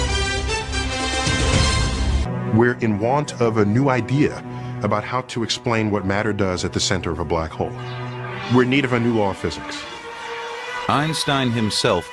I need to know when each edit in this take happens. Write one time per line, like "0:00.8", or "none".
0:06.7